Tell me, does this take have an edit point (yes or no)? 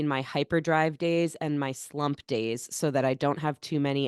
no